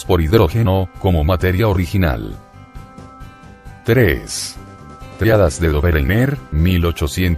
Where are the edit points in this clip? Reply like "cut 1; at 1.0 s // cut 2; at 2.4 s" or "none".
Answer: cut 1; at 5.9 s